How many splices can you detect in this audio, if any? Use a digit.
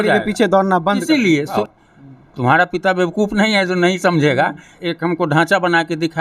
2